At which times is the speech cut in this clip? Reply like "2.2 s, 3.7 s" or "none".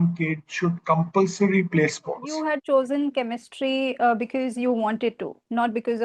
2.3 s